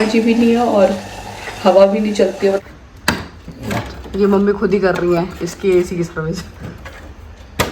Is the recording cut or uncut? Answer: cut